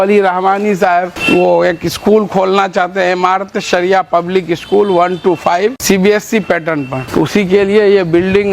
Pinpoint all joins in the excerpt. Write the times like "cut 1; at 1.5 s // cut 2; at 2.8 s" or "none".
cut 1; at 1.2 s // cut 2; at 5.8 s // cut 3; at 7.0 s